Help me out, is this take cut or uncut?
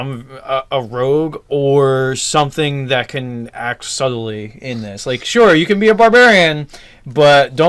cut